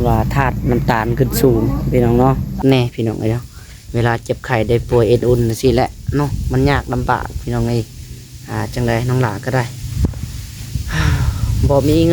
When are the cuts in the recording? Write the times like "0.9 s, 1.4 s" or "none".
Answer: 2.6 s

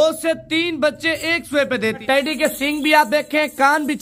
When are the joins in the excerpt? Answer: 2.0 s

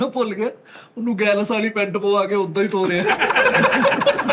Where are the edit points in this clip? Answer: none

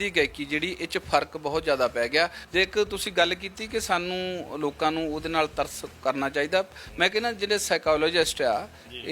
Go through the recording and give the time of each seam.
2.4 s

